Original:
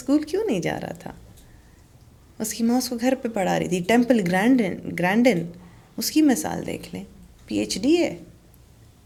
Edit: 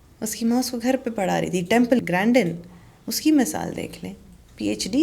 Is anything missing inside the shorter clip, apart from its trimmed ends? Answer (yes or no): yes